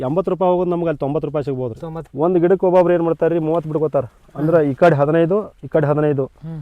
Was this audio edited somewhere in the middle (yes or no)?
yes